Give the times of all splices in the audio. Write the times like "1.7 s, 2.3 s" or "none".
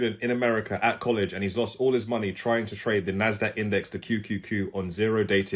none